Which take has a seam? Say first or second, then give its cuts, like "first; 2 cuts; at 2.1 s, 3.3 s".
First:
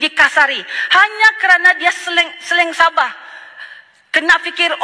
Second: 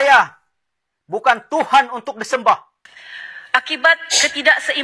second; 1 cut; at 2.7 s